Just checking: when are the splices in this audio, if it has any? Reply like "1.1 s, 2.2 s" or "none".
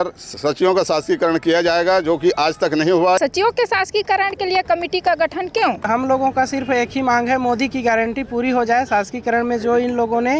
3.2 s, 5.8 s